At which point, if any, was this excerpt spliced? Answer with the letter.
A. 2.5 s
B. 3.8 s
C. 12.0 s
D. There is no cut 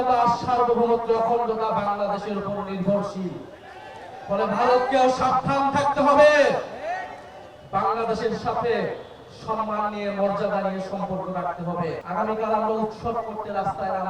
C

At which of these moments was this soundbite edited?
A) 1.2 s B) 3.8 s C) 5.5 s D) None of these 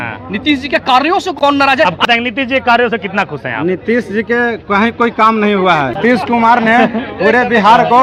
D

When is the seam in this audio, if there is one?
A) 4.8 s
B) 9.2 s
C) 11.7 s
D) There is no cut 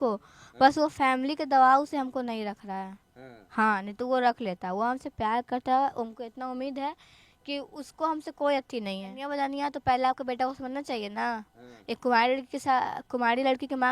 B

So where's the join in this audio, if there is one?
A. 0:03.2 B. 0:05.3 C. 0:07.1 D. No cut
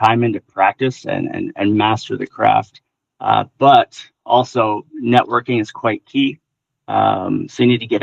D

